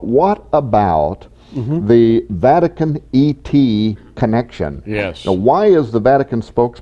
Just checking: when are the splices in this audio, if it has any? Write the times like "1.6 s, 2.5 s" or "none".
5.7 s